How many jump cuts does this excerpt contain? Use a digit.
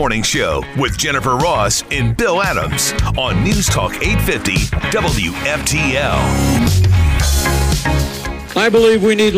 1